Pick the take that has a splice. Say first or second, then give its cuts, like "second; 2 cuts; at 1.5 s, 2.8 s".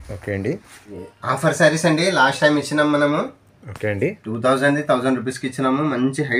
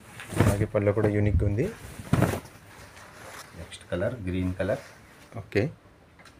first; 1 cut; at 1.1 s